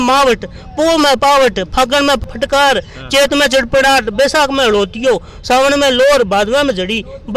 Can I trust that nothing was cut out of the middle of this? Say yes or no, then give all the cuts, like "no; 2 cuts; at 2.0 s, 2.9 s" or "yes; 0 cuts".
no; 1 cut; at 2.3 s